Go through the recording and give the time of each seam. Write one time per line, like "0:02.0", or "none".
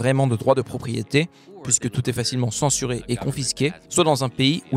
0:03.8